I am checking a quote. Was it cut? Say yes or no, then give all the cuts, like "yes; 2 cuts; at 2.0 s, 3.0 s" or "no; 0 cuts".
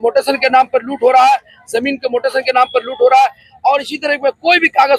no; 0 cuts